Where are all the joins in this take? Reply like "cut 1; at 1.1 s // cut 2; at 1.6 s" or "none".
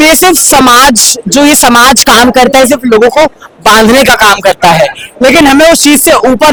none